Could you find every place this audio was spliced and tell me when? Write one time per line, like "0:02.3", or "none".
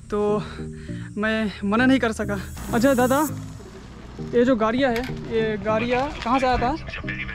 0:02.5